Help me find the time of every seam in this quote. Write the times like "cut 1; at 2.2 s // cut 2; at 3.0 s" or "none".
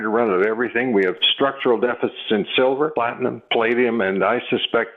cut 1; at 1.2 s // cut 2; at 2.9 s